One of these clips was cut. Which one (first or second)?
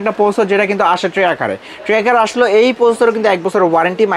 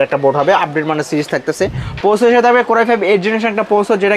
second